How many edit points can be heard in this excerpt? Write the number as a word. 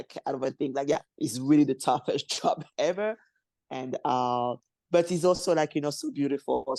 zero